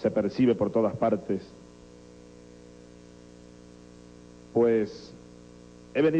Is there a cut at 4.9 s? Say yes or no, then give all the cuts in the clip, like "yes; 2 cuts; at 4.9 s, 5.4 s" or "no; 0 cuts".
yes; 1 cut; at 4.9 s